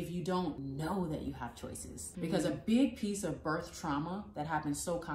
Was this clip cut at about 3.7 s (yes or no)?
no